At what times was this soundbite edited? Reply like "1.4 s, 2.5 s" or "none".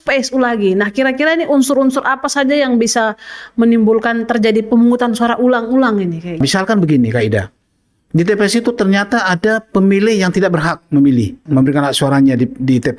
6.4 s, 11.4 s